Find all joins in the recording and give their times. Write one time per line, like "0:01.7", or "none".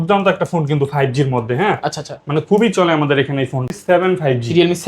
0:03.6

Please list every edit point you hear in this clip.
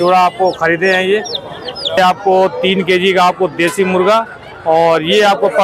0:02.0

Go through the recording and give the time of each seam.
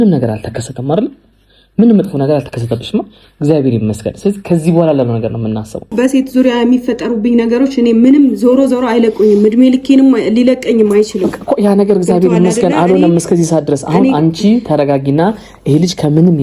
0:05.9

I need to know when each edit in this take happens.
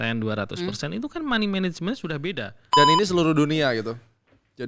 0:02.6

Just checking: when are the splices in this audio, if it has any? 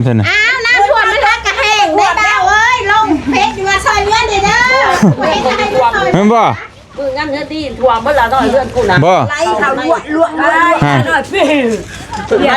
none

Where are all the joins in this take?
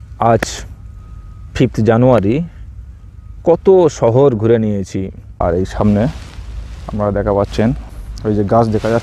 0:05.2
0:07.9

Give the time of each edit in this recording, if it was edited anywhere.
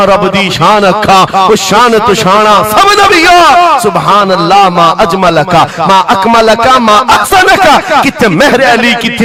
none

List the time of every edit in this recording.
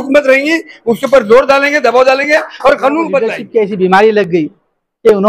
0:03.4

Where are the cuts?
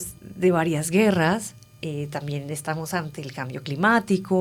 none

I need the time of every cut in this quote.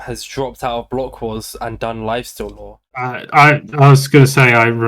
0:03.1

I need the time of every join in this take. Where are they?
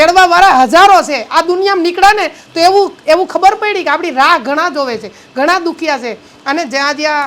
none

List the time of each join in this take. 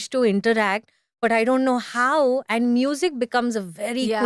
none

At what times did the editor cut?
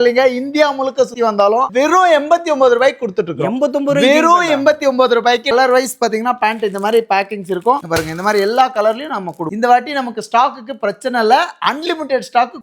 0:01.7
0:05.5
0:09.5

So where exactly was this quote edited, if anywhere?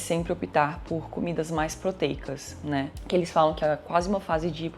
0:03.0

